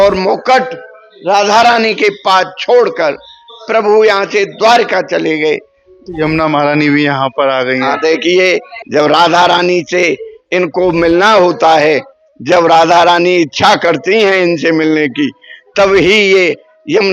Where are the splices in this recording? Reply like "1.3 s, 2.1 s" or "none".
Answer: 6.0 s, 8.8 s